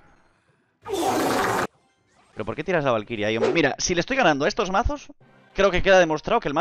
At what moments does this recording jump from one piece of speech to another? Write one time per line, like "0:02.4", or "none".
0:03.5